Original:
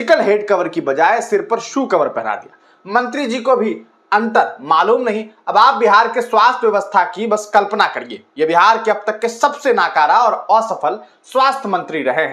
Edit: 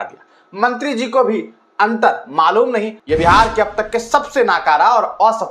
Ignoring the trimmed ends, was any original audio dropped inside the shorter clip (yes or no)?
yes